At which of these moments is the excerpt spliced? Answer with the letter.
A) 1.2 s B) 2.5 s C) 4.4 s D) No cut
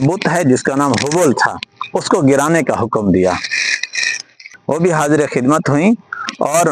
C